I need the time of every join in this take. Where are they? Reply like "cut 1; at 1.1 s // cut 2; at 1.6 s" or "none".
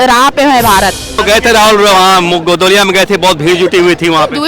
cut 1; at 1.2 s